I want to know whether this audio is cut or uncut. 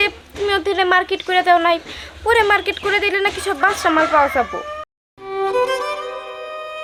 uncut